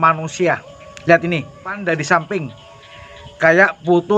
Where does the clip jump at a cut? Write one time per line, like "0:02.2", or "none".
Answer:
0:01.8